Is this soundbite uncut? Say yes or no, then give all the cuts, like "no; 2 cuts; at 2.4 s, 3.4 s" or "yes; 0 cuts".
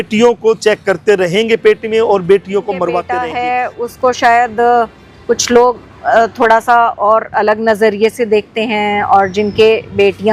no; 1 cut; at 3.2 s